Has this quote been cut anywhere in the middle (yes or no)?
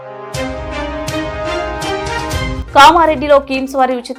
no